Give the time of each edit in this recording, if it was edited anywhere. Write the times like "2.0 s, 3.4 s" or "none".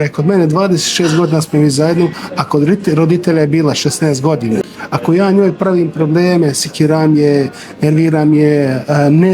4.6 s